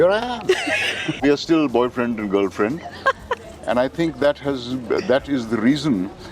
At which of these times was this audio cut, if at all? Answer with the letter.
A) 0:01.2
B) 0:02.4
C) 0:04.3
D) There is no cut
A